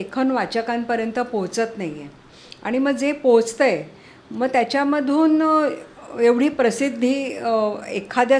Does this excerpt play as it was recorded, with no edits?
yes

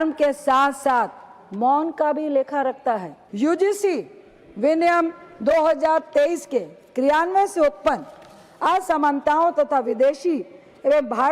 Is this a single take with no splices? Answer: no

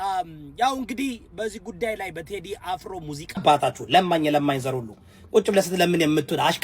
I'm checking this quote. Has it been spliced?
yes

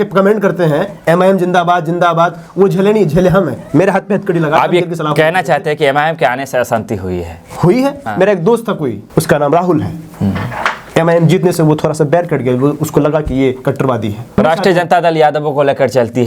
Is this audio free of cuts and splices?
no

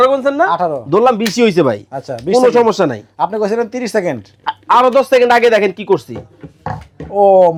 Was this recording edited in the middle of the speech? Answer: no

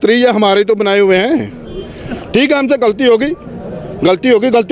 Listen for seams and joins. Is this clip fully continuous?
yes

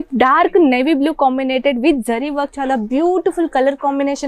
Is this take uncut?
yes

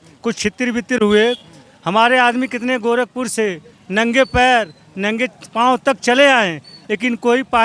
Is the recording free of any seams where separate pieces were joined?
yes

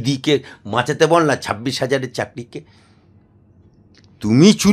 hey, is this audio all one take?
yes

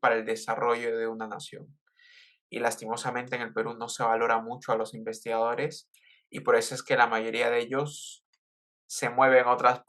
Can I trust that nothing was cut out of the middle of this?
yes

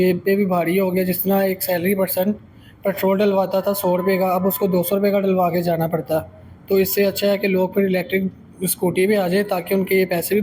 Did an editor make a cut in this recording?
no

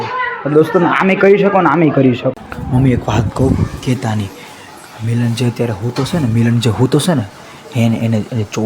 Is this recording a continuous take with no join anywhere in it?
no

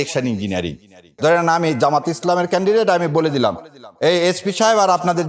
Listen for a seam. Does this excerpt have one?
yes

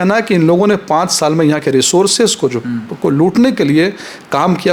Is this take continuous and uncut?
yes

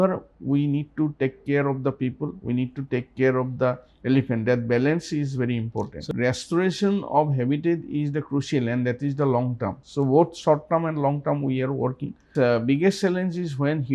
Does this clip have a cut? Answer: yes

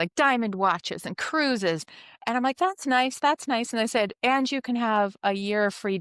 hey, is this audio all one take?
yes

